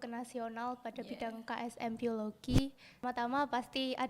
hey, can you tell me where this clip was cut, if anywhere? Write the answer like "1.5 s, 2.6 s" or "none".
3.0 s